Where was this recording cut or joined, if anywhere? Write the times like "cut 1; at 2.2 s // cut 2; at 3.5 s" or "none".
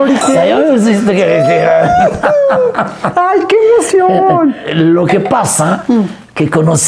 cut 1; at 4.7 s

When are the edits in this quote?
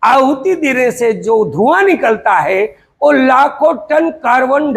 none

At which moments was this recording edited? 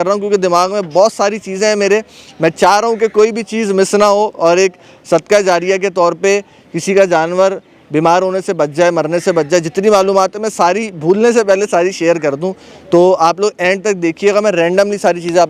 none

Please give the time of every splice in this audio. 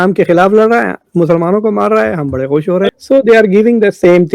cut 1; at 2.9 s

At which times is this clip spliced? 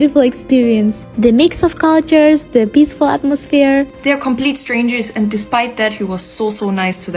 cut 1; at 3.9 s

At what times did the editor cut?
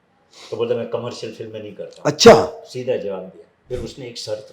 cut 1; at 3.5 s

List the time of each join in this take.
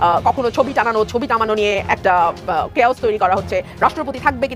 none

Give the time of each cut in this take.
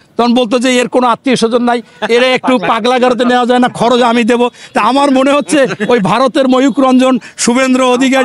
none

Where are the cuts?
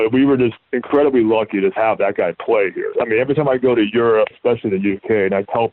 cut 1; at 1.8 s // cut 2; at 2.9 s // cut 3; at 4.3 s

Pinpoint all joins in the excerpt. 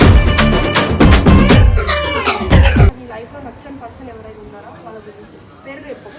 cut 1; at 3.1 s

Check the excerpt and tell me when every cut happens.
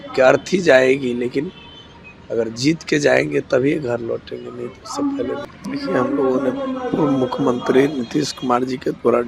cut 1; at 5.4 s

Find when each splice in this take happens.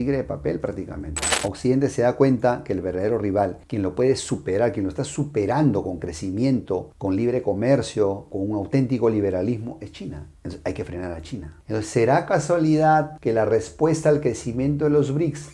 cut 1; at 1.3 s

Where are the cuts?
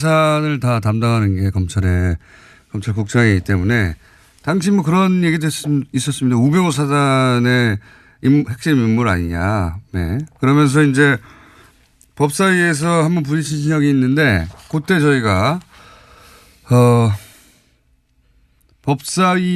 none

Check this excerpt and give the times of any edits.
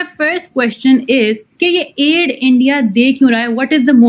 cut 1; at 1.5 s

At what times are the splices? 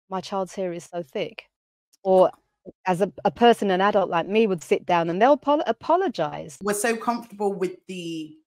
cut 1; at 6.6 s

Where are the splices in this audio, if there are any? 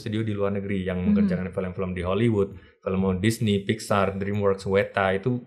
none

